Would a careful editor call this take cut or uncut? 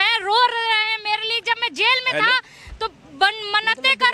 uncut